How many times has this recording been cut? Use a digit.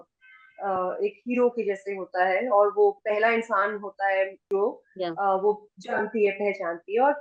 1